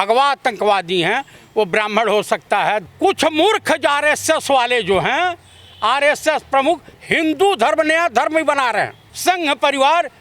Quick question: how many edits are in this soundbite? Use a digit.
2